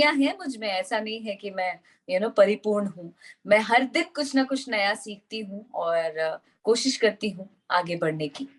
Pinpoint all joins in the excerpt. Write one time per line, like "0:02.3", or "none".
none